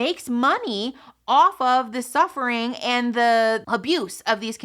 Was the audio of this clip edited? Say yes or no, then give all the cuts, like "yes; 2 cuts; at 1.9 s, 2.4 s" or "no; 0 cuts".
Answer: yes; 1 cut; at 3.6 s